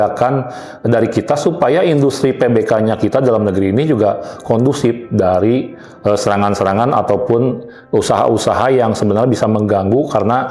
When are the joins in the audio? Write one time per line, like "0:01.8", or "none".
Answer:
none